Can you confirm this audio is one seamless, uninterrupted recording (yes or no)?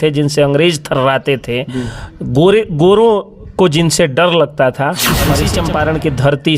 no